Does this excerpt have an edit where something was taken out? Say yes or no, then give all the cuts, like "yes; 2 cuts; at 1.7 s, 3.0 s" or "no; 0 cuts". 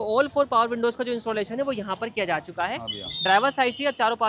no; 0 cuts